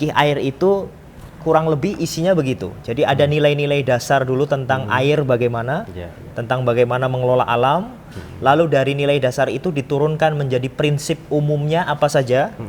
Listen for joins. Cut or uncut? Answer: uncut